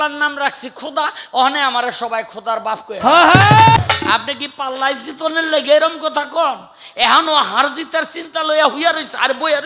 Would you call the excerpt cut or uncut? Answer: cut